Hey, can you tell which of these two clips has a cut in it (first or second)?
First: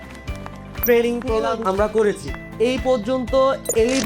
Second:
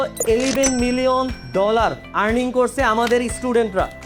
first